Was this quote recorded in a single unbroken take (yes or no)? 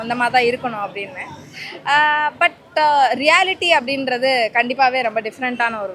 yes